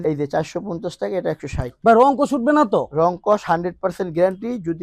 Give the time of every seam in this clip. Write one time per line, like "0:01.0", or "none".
none

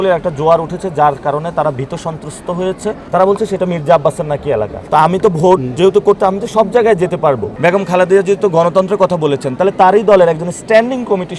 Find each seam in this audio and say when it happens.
0:02.9
0:04.8
0:07.5

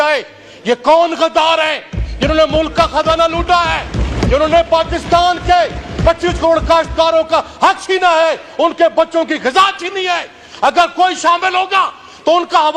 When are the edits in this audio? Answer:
none

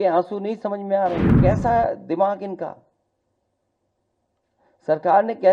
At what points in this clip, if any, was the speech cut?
0:01.4

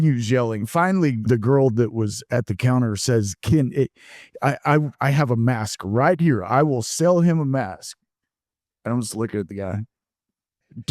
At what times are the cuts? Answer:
0:01.2

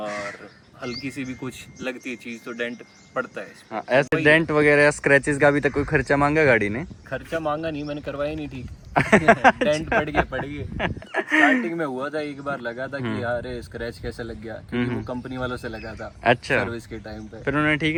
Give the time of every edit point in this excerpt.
none

